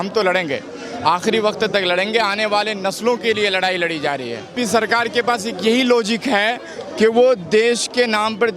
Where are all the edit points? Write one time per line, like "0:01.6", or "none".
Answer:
0:04.5